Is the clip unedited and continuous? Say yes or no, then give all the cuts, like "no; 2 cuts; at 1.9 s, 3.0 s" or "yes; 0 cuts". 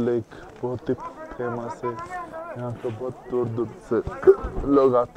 yes; 0 cuts